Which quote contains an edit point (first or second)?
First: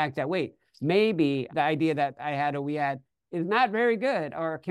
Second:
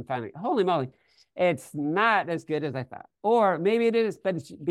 first